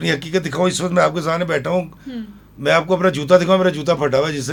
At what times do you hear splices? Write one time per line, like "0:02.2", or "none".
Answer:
none